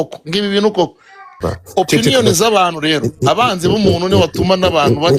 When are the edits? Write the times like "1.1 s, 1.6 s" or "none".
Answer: 1.5 s